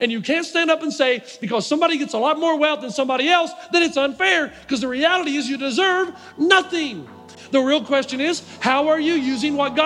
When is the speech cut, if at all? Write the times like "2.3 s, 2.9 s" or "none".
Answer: 7.2 s